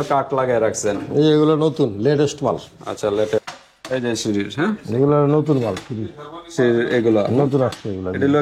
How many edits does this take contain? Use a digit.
1